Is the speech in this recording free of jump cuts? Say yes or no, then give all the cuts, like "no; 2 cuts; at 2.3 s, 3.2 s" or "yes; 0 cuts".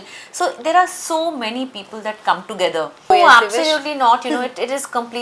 no; 1 cut; at 3.1 s